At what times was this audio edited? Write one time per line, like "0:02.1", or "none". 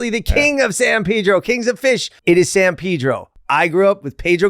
0:02.1
0:03.3

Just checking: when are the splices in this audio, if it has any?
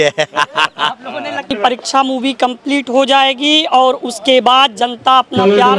0:01.5

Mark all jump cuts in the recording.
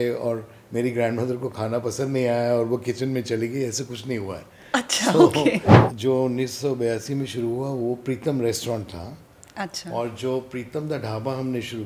0:05.7

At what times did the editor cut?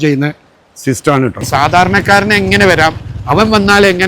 0:01.5

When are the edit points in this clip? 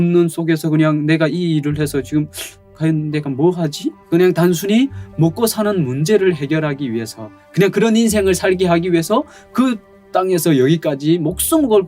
0:04.0

